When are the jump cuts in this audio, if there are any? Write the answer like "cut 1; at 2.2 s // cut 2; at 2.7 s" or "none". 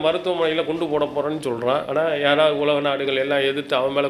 cut 1; at 1.9 s

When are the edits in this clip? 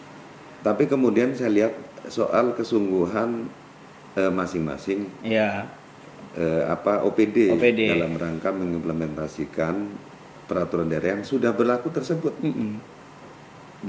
none

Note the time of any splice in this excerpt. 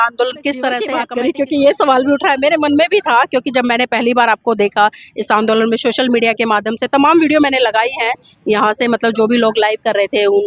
cut 1; at 1.0 s

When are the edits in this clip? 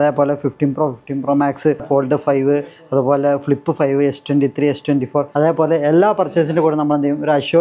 cut 1; at 1.8 s // cut 2; at 5.3 s

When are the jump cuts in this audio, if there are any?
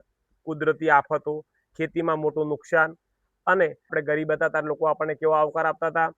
cut 1; at 3.9 s

